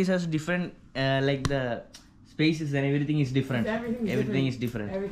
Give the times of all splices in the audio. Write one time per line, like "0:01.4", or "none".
none

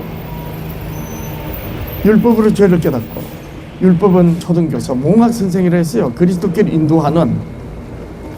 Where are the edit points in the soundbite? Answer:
0:04.4

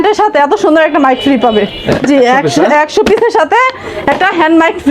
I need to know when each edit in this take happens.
none

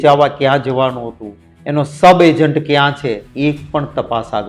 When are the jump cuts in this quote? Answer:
0:03.3

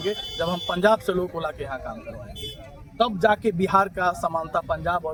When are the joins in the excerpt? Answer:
none

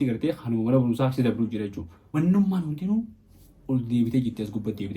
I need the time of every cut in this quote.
0:02.2

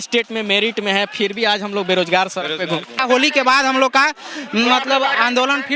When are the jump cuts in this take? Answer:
0:03.0

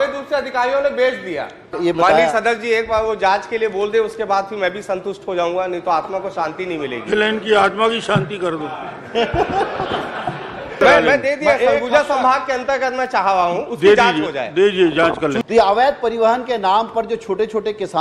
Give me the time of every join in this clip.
0:01.7
0:10.8
0:15.4

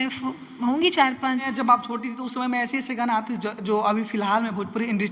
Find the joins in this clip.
0:01.5

